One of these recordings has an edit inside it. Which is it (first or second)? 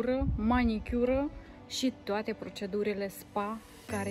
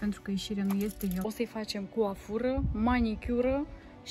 second